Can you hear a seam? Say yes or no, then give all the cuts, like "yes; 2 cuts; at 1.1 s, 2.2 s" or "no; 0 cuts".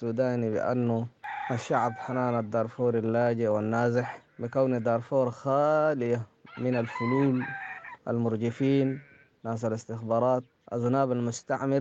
no; 0 cuts